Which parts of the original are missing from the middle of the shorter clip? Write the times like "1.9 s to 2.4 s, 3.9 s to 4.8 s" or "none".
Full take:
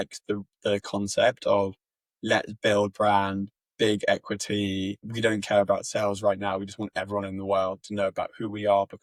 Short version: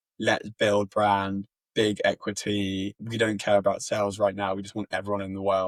none